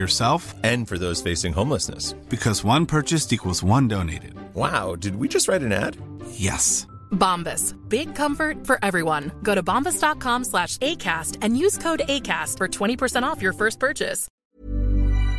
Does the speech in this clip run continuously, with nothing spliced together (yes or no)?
no